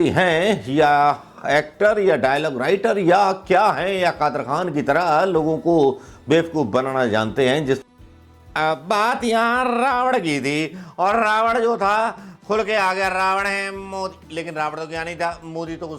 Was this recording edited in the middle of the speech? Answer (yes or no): yes